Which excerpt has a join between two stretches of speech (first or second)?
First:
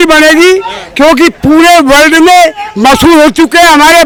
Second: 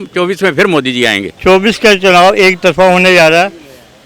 second